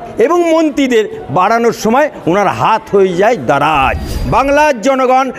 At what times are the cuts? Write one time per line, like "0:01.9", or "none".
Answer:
0:04.1

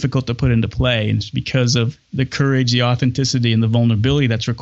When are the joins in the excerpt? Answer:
none

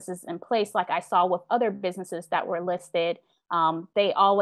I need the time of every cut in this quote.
none

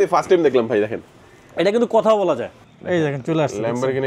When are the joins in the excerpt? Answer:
0:02.5

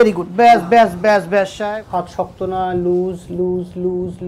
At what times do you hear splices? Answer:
0:01.6

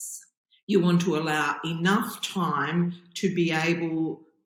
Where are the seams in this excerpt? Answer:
none

